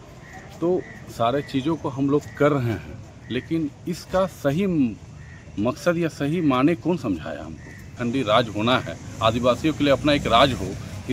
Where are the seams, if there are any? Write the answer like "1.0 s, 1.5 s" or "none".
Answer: 7.9 s